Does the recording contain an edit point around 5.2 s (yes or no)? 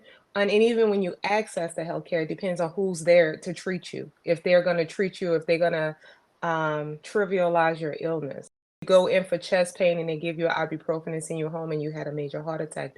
no